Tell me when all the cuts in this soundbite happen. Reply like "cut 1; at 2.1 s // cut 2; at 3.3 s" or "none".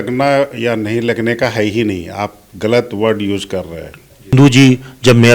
cut 1; at 4.3 s